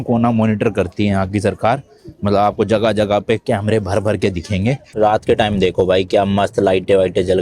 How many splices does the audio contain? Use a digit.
1